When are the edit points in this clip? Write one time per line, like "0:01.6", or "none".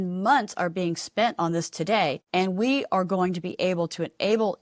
0:02.2

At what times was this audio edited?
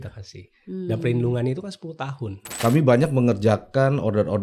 0:02.6

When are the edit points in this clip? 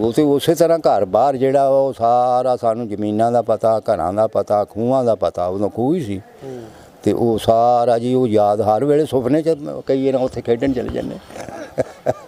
none

